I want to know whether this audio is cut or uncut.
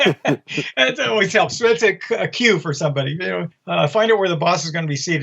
uncut